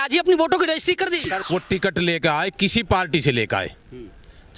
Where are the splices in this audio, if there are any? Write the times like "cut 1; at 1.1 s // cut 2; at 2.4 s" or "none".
cut 1; at 1.3 s